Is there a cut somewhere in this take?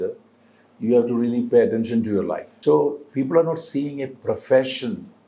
yes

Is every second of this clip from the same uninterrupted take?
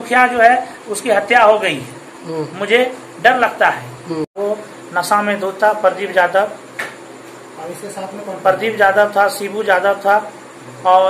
no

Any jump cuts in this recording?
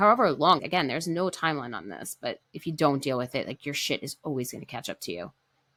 no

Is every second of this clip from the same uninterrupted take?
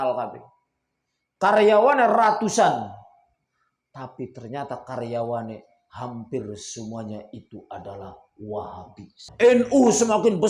no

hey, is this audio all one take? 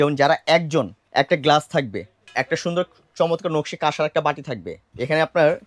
no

